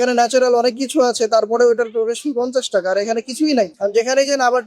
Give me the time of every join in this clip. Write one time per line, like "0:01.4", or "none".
0:03.7

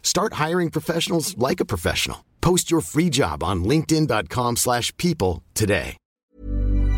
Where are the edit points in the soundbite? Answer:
0:06.0

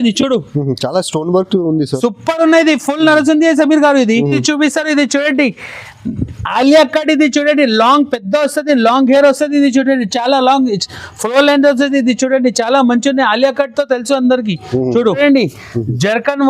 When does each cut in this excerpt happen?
0:04.4
0:15.2

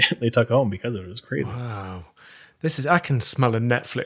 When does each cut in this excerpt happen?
none

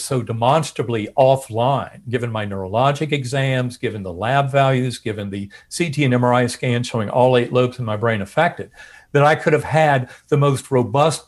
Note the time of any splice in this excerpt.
none

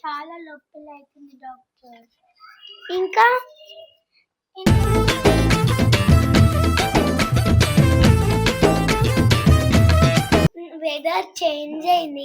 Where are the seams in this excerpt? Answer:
0:10.7

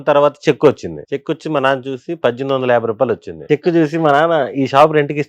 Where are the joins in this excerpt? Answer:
0:00.9
0:03.5

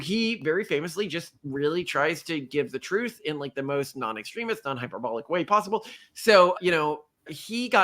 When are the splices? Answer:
0:06.0

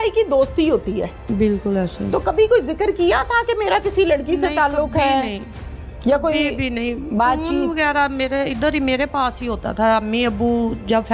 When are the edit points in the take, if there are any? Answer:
0:01.3

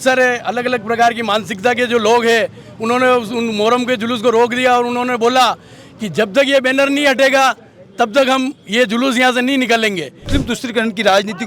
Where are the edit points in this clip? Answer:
0:10.3

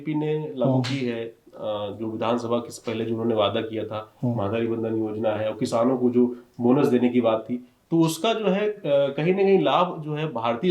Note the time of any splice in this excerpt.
none

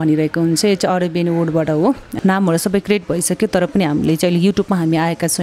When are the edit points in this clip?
0:02.1

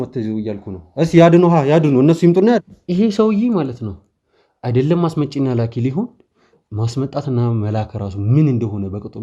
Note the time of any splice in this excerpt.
0:02.6

